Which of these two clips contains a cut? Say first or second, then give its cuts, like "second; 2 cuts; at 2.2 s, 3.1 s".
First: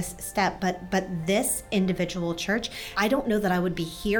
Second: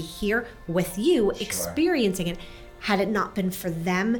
first; 1 cut; at 2.9 s